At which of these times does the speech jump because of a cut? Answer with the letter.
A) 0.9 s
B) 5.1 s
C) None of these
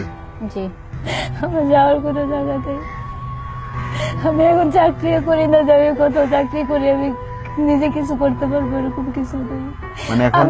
A